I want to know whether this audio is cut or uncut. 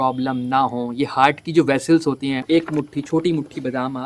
cut